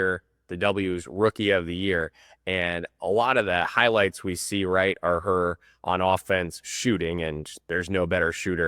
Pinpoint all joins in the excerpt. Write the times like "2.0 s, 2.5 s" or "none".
none